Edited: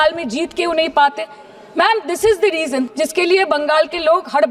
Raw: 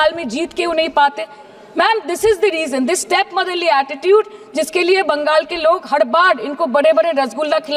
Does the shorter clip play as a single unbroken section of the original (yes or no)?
no